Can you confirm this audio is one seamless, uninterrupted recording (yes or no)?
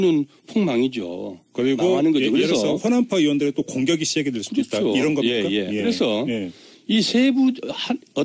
yes